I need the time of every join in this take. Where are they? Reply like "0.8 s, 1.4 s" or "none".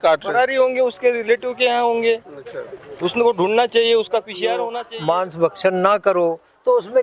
4.8 s